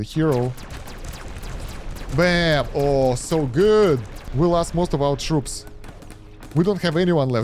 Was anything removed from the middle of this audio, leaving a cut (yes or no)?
yes